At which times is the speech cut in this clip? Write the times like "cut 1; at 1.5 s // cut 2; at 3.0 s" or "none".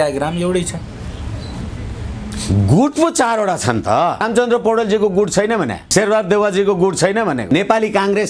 cut 1; at 4.2 s // cut 2; at 5.8 s // cut 3; at 7.4 s